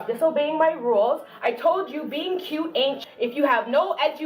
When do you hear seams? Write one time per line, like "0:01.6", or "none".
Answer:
0:03.0